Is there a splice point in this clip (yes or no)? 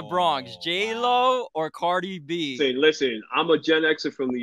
yes